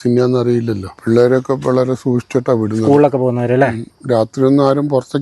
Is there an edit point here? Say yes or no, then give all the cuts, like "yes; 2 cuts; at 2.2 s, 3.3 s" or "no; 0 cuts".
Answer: yes; 2 cuts; at 0.9 s, 3.9 s